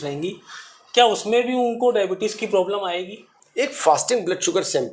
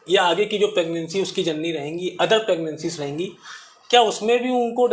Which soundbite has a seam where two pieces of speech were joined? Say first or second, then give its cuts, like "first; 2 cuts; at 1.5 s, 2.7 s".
first; 1 cut; at 3.4 s